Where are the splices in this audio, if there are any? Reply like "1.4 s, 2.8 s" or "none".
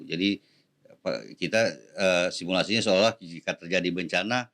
none